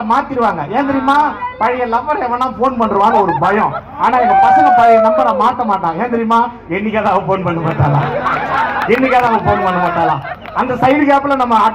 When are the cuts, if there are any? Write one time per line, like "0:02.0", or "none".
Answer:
none